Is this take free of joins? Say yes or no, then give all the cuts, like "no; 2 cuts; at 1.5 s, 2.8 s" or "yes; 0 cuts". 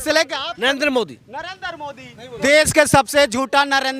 no; 1 cut; at 2.3 s